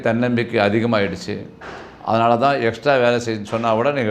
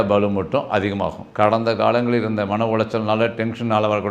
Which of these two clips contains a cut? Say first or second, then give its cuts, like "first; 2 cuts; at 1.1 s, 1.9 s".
second; 1 cut; at 1.2 s